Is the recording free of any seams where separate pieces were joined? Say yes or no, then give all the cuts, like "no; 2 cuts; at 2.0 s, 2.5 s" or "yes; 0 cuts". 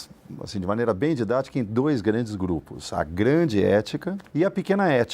no; 1 cut; at 4.2 s